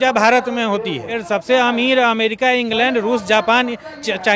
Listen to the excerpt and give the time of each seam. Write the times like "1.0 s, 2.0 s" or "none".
1.2 s